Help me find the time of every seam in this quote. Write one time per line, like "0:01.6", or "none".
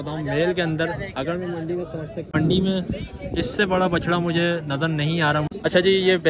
0:02.3
0:05.5